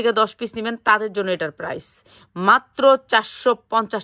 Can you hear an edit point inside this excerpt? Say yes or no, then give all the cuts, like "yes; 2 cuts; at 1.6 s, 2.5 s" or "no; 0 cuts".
no; 0 cuts